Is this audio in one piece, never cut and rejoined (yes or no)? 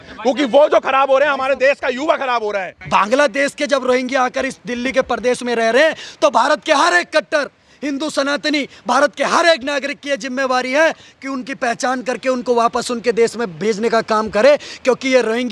no